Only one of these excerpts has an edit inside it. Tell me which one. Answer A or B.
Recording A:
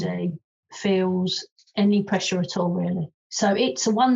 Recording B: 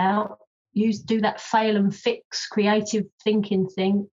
A